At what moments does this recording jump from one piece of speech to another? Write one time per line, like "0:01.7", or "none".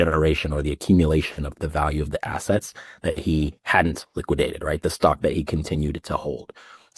0:01.5